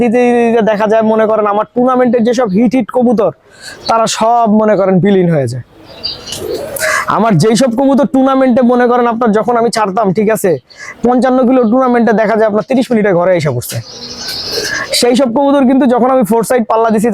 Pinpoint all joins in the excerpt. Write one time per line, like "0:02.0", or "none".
none